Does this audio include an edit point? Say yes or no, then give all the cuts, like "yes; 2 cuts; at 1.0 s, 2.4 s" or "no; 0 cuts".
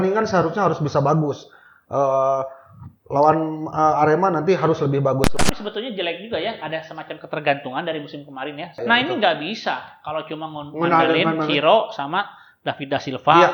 yes; 2 cuts; at 5.4 s, 8.8 s